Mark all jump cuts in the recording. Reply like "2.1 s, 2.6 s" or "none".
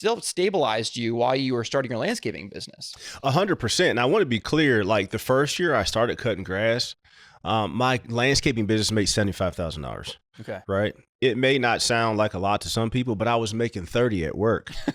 none